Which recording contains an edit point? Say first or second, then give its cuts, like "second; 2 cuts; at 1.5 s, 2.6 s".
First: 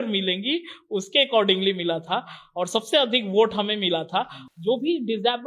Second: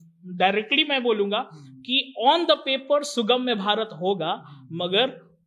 first; 1 cut; at 4.5 s